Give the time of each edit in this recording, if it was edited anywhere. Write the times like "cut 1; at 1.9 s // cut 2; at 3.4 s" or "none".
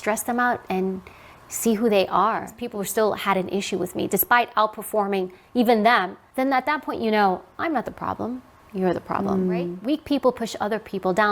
cut 1; at 2.6 s // cut 2; at 6.2 s // cut 3; at 9.8 s